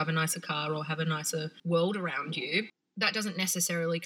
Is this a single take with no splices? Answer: no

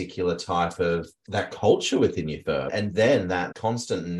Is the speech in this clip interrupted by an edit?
yes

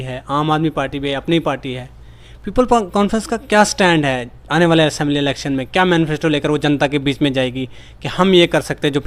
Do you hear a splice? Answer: no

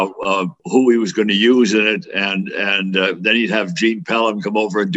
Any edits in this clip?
no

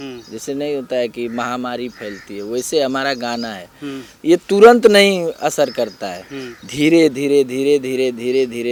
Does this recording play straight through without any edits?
yes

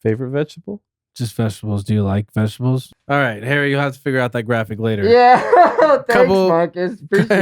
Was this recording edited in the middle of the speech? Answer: yes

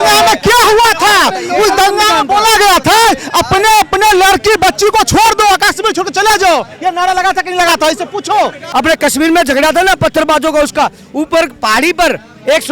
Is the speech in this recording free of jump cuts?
no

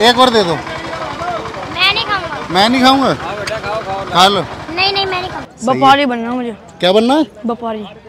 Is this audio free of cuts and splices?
no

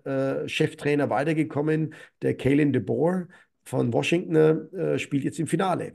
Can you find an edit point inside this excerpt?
no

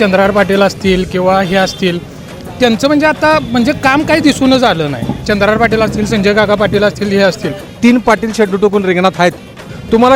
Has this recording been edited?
yes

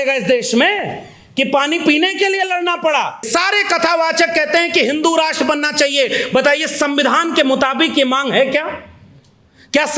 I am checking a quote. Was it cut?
yes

